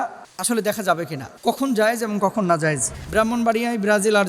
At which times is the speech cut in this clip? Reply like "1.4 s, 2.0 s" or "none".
1.2 s, 2.9 s